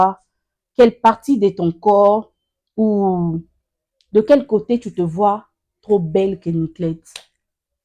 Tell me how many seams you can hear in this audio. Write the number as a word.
zero